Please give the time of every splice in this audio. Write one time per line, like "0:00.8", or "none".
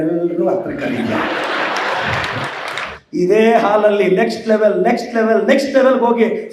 0:02.9